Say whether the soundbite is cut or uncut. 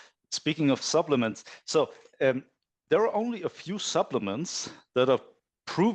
uncut